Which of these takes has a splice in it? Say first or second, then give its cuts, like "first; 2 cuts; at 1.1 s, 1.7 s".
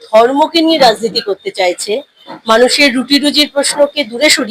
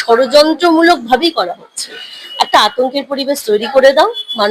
first; 1 cut; at 2.3 s